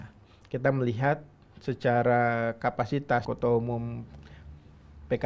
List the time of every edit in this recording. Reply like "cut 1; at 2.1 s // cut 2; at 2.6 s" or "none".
cut 1; at 3.3 s